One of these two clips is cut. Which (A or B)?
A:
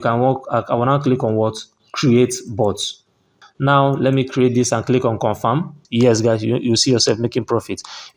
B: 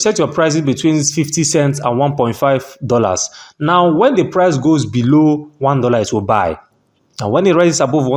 A